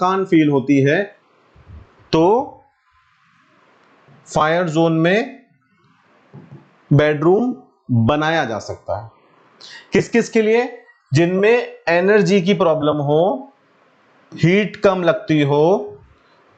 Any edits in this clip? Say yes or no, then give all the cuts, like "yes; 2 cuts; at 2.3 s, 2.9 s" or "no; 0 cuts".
no; 0 cuts